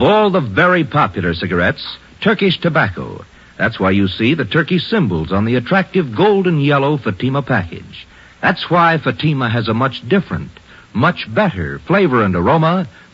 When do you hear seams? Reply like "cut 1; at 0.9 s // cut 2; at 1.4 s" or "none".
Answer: none